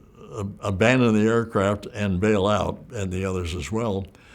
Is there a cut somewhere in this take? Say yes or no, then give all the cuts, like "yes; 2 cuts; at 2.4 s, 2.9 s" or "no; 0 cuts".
yes; 1 cut; at 2.9 s